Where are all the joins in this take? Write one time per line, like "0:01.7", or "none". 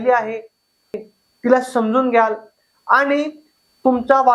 0:00.9